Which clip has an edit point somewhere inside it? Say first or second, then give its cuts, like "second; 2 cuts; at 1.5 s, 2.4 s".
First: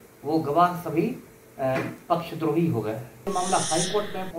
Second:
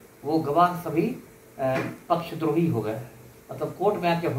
first; 1 cut; at 3.3 s